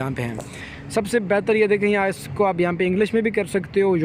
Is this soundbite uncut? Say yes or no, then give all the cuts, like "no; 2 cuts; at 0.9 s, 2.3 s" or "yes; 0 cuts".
yes; 0 cuts